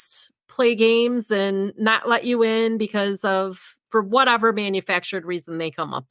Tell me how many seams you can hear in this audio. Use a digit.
1